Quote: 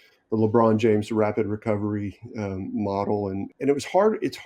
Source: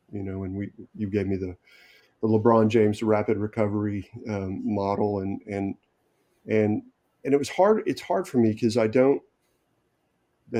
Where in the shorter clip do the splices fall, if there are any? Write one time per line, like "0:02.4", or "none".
0:03.5